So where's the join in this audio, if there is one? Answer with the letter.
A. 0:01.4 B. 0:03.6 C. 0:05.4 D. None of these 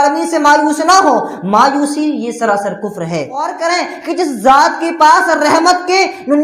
B